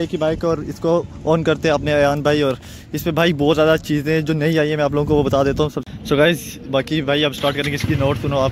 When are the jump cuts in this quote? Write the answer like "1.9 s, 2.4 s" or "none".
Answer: 5.8 s